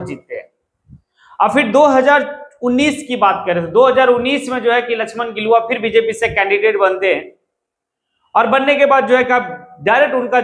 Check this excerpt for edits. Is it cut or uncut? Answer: uncut